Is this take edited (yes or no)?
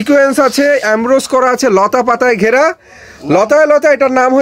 no